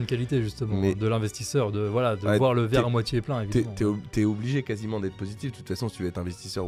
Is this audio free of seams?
yes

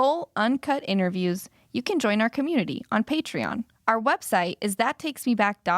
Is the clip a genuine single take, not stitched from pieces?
no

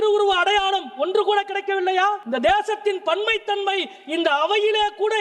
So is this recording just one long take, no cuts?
no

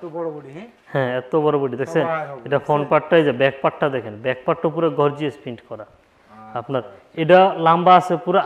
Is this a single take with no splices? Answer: yes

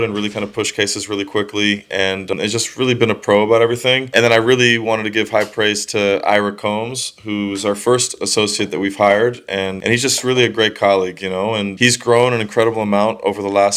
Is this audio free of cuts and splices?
no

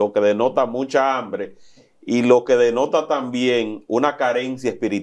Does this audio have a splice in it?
no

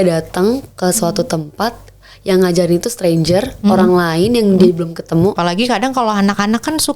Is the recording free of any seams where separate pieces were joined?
no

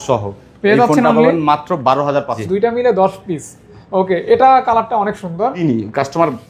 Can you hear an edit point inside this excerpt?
yes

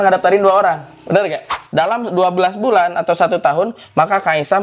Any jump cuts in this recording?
yes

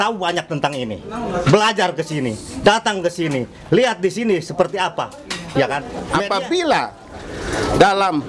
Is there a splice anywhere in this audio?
yes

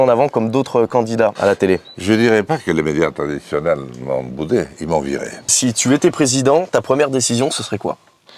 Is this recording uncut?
no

